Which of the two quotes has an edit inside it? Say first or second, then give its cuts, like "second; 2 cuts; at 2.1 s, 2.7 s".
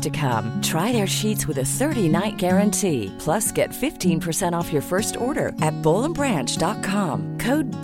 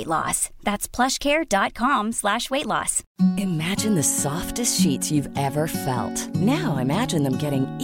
second; 1 cut; at 3.0 s